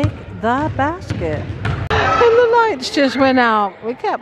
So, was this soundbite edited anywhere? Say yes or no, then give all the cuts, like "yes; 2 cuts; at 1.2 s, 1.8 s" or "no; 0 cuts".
yes; 1 cut; at 1.9 s